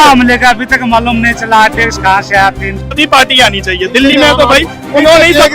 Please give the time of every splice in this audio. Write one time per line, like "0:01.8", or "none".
0:02.9

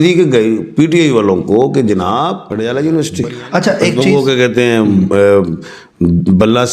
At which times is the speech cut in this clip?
0:02.4

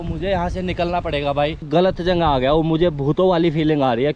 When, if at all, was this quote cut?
0:01.7

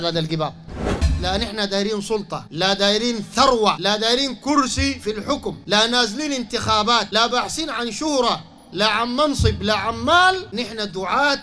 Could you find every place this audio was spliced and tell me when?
0:00.9
0:02.4
0:03.8
0:05.6
0:07.1
0:10.5

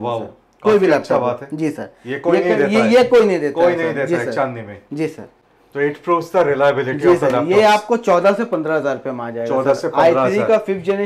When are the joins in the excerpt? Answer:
none

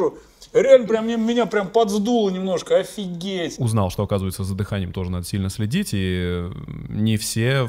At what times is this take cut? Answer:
0:03.5

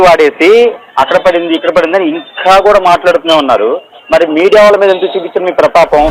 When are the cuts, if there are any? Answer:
none

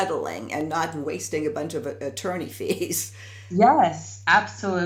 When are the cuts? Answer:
none

